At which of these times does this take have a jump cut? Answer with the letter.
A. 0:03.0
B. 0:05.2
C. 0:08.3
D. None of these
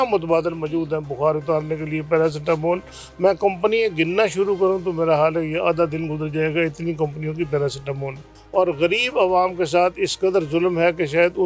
C